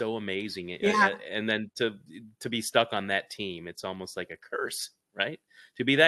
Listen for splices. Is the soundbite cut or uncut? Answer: uncut